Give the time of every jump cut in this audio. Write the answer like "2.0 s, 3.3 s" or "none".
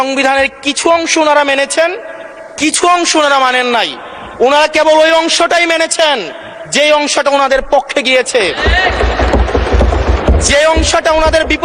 none